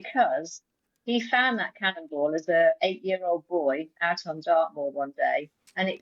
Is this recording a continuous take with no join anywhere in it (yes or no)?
yes